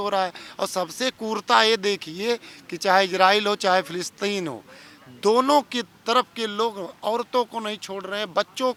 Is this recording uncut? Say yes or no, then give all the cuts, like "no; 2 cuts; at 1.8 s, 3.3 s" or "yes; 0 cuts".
yes; 0 cuts